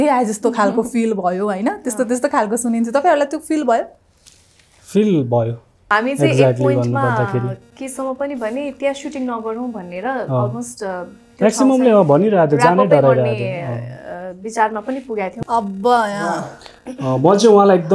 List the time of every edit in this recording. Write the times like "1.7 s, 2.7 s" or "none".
5.9 s, 15.3 s